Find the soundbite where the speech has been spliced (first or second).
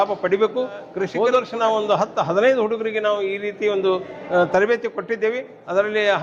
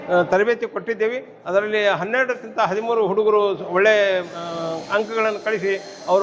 first